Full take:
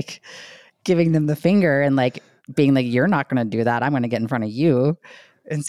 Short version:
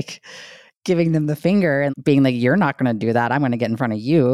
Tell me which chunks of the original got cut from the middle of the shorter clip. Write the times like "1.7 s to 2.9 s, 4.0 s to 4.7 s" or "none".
1.9 s to 2.4 s